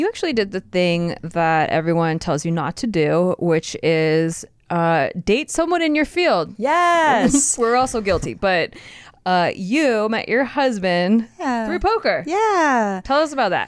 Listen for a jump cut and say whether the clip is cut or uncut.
uncut